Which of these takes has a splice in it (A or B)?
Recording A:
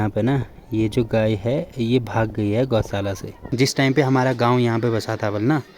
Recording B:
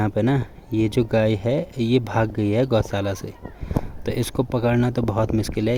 A